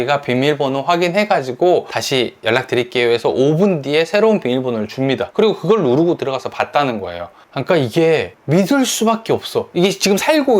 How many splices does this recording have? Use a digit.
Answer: 2